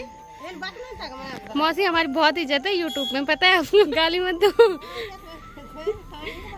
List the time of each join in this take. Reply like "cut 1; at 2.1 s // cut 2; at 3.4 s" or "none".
none